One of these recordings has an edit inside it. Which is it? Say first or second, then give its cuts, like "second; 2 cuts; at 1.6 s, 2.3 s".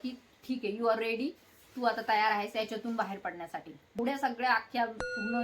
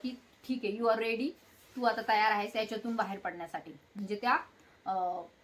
first; 1 cut; at 4.0 s